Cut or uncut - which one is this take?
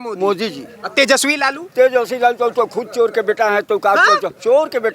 uncut